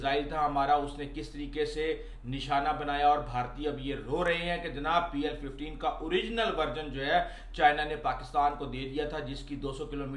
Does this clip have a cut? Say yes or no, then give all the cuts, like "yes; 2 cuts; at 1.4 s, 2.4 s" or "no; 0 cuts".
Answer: no; 0 cuts